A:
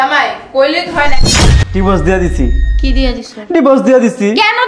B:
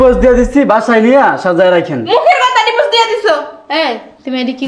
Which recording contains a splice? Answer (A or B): A